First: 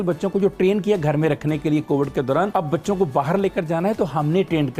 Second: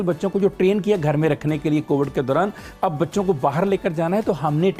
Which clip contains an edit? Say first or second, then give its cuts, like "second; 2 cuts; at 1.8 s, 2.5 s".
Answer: first; 1 cut; at 2.5 s